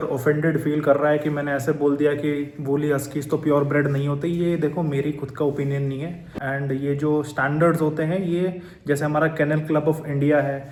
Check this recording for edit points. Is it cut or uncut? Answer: uncut